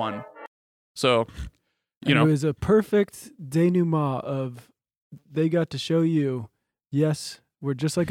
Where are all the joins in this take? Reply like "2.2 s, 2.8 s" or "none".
2.2 s